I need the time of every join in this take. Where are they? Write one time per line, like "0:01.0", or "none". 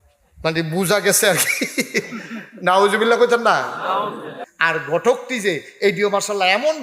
0:04.4